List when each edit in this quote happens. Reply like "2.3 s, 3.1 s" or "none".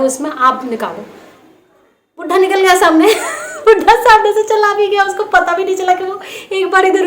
none